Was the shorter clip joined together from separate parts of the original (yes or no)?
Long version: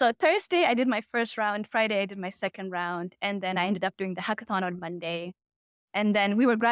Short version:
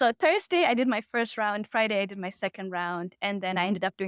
no